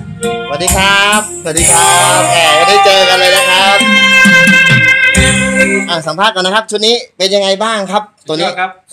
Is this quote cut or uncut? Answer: uncut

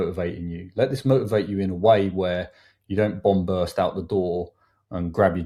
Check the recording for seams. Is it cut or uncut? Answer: uncut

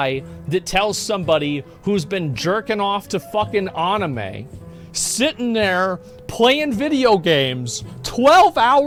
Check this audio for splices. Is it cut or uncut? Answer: uncut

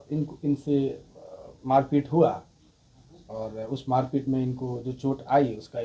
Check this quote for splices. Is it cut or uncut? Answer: uncut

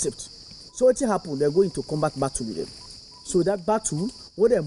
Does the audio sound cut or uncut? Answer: cut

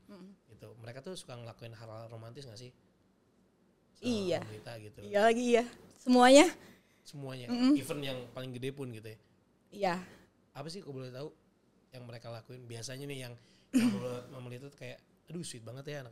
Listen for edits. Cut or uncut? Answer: uncut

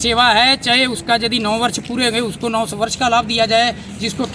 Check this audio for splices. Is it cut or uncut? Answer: uncut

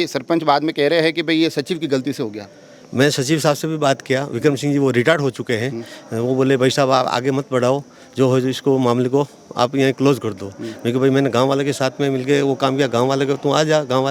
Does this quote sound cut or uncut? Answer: uncut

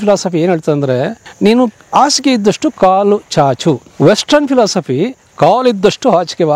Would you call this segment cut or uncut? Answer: cut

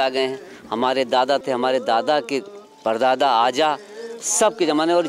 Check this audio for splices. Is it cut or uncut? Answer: uncut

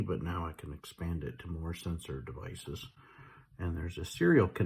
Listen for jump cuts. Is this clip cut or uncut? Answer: uncut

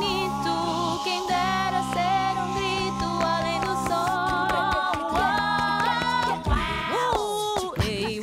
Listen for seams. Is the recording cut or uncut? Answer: uncut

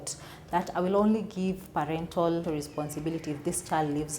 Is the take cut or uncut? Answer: cut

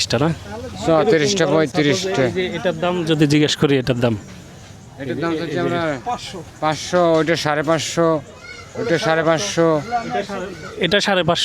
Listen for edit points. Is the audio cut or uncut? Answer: uncut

